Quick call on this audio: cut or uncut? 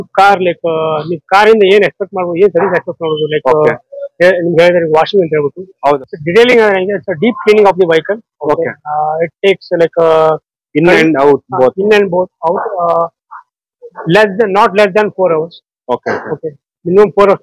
cut